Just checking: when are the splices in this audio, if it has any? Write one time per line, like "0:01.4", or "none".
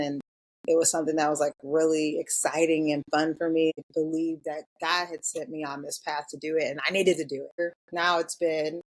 0:03.7
0:07.6